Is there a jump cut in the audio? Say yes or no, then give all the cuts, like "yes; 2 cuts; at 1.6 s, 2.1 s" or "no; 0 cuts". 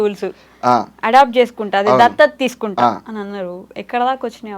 no; 0 cuts